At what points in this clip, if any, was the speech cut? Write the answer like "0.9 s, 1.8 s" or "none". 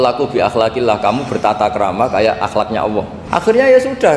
3.2 s